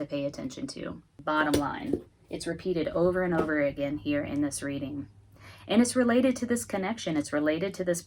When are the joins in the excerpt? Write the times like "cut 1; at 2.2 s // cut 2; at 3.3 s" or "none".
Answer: cut 1; at 1.1 s